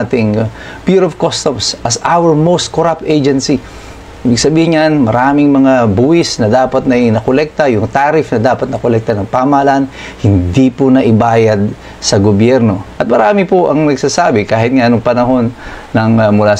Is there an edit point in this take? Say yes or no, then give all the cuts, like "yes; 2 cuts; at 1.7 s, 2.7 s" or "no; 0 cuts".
yes; 1 cut; at 12.9 s